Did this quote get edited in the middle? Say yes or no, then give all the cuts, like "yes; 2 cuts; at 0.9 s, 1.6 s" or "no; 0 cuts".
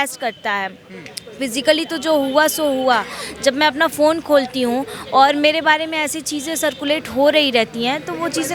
no; 0 cuts